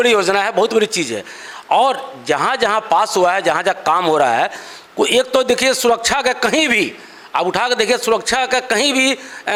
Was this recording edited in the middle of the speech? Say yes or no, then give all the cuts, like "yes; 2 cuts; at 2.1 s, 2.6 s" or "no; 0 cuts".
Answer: no; 0 cuts